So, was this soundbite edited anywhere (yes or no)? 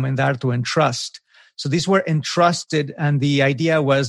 no